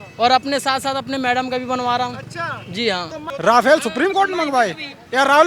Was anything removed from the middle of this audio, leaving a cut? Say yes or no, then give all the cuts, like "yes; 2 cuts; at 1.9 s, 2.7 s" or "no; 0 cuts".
yes; 1 cut; at 3.2 s